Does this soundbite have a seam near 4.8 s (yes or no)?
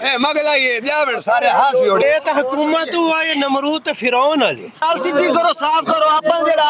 yes